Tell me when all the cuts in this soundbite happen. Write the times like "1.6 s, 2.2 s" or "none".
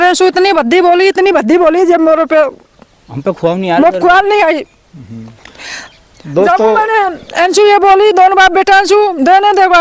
none